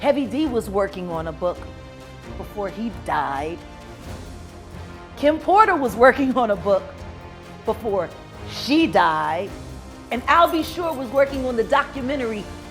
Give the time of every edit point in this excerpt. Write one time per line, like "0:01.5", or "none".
none

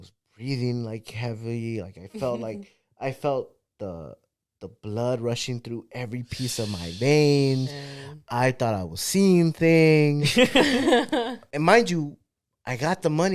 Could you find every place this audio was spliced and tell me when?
0:11.4

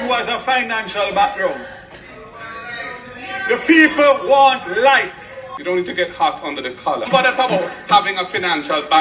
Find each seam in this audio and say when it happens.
0:05.5
0:07.1

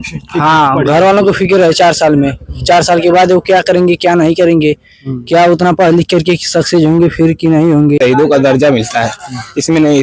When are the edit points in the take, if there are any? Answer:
0:08.0

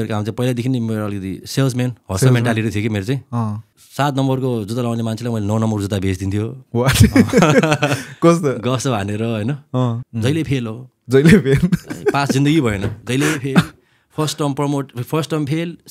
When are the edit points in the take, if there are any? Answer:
0:10.1

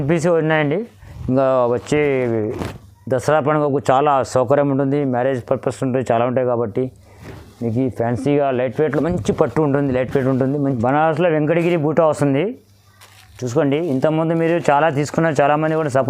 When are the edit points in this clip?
0:10.8

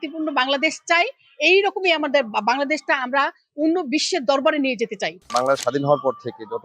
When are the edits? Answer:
0:05.2

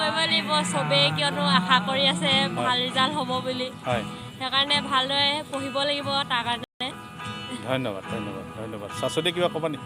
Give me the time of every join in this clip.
none

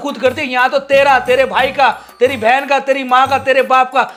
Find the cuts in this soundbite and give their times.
none

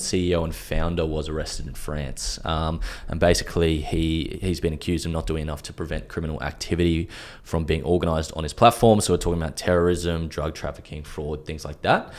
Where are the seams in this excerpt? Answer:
none

